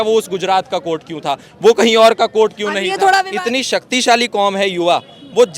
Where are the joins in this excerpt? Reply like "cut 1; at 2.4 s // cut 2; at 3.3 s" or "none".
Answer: cut 1; at 3.3 s